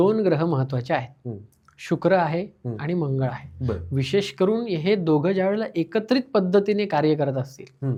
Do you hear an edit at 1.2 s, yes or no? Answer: no